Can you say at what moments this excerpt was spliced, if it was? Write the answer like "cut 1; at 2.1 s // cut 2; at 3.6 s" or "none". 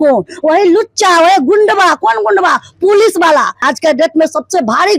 cut 1; at 3.6 s